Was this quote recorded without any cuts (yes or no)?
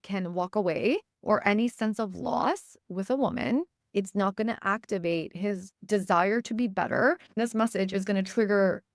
no